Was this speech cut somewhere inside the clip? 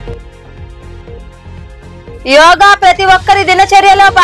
no; 0 cuts

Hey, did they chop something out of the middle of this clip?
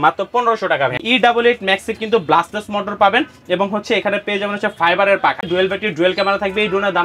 yes; 2 cuts; at 1.0 s, 5.5 s

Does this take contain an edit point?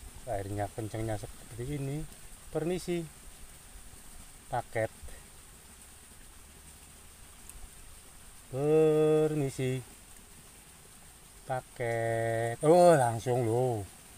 no; 0 cuts

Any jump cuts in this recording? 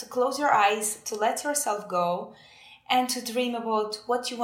no; 0 cuts

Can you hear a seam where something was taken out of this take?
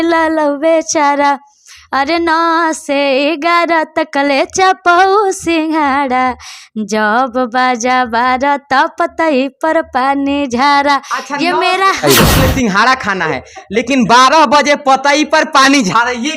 yes; 1 cut; at 12.2 s

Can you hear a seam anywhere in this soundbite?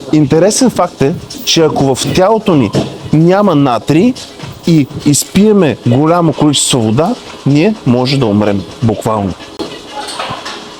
no; 0 cuts

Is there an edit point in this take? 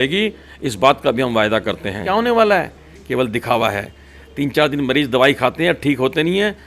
yes; 1 cut; at 2.0 s

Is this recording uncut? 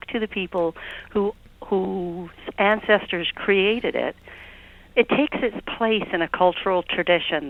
yes; 0 cuts

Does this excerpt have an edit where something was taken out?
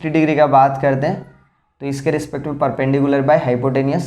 no; 0 cuts

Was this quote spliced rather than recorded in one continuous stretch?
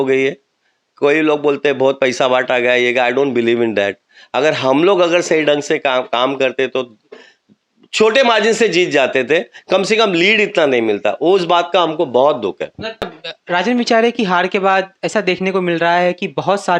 yes; 1 cut; at 13.0 s

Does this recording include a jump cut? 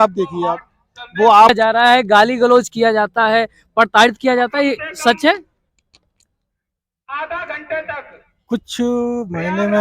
yes; 1 cut; at 1.5 s

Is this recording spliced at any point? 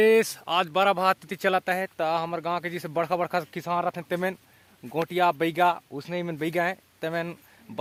no; 0 cuts

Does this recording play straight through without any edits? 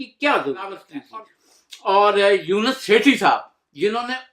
no; 1 cut; at 0.9 s

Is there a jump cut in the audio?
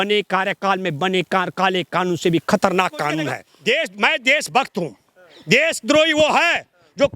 yes; 1 cut; at 3.5 s

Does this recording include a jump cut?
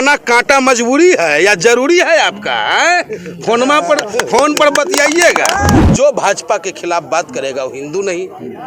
yes; 1 cut; at 5.8 s

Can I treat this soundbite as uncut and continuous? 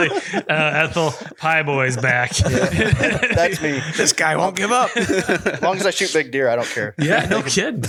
yes; 0 cuts

